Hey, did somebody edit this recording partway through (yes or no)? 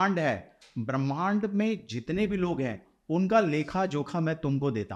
no